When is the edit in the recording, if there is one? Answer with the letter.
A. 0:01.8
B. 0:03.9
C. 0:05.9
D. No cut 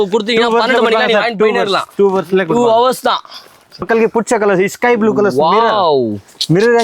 B